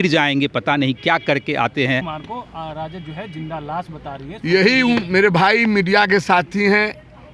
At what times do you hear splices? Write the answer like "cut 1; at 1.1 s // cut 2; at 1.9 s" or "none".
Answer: cut 1; at 2.2 s